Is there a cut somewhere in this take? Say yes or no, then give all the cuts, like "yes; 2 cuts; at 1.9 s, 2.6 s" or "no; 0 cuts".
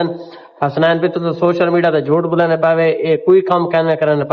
no; 0 cuts